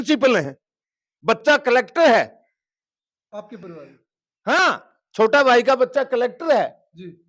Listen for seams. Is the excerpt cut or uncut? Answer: uncut